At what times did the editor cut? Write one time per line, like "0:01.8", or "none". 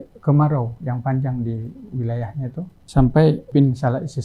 0:02.8
0:03.5